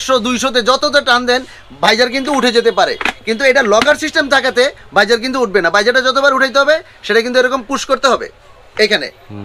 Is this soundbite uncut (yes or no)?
yes